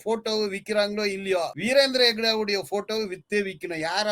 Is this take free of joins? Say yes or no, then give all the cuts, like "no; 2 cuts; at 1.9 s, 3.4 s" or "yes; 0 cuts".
no; 1 cut; at 1.6 s